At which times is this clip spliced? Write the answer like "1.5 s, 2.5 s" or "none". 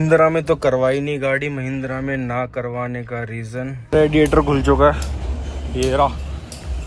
3.8 s